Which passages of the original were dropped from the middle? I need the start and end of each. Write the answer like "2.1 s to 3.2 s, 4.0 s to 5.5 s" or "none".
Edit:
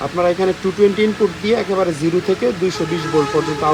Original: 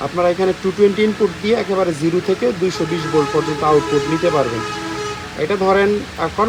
none